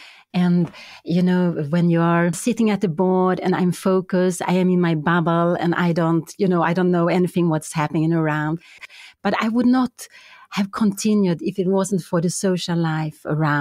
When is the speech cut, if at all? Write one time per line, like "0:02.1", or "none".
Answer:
0:02.4
0:08.8